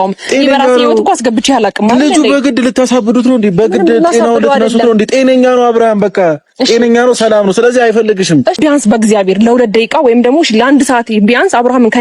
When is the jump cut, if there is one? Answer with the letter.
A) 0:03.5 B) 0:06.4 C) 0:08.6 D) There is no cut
C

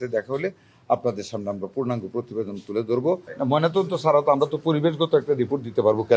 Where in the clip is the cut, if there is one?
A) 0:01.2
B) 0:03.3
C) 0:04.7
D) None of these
B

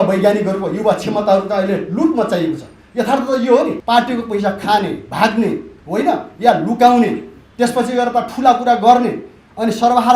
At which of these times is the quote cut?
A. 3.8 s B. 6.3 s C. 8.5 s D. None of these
A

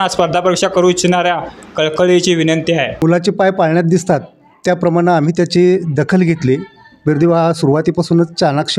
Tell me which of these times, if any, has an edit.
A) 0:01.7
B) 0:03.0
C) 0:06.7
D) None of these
B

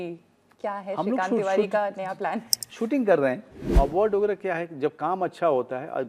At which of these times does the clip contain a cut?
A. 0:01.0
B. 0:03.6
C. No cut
B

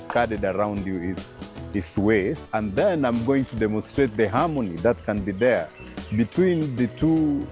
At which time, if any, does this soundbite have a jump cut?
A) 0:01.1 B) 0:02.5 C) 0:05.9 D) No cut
B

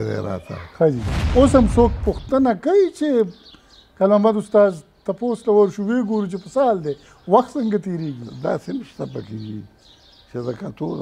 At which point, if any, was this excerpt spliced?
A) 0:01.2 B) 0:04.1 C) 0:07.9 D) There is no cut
A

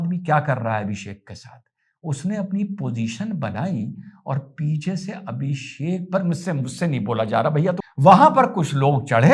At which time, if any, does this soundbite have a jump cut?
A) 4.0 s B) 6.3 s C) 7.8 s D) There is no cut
C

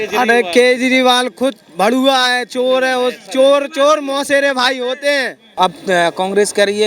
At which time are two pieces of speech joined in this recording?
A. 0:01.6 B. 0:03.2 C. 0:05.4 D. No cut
C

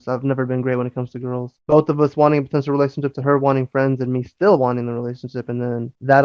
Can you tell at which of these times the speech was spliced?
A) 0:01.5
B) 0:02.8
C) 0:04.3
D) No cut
A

